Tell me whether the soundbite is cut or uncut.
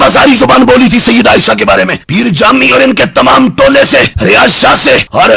uncut